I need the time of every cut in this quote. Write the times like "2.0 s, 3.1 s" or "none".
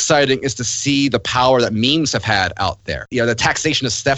3.1 s